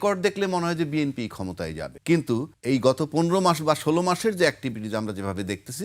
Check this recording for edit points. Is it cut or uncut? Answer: cut